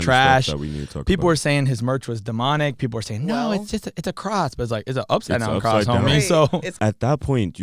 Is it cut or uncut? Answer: cut